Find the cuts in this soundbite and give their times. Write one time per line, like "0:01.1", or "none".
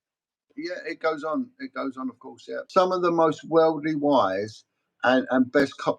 0:02.5